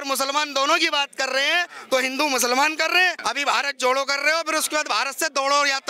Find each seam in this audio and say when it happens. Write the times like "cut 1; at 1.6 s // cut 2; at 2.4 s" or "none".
cut 1; at 3.2 s